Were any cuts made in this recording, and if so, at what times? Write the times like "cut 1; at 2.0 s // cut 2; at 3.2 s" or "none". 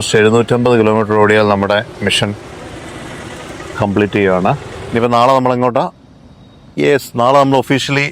cut 1; at 4.7 s